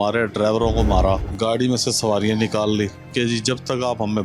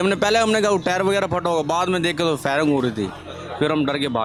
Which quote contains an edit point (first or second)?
first